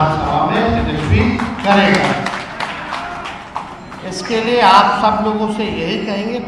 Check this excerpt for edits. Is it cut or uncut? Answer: uncut